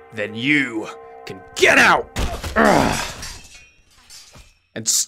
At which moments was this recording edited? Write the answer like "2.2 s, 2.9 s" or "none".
none